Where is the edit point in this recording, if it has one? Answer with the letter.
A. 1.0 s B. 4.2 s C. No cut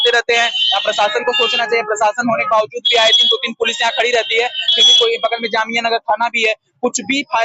C